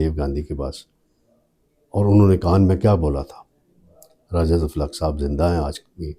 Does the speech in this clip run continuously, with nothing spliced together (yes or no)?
yes